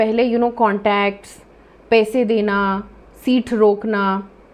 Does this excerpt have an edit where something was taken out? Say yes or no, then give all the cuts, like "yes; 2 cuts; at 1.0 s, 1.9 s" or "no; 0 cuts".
no; 0 cuts